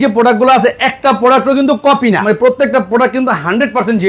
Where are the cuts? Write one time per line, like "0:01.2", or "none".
0:02.2